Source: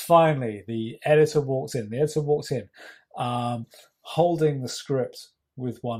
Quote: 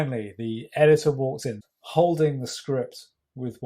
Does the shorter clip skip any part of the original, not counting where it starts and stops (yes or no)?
yes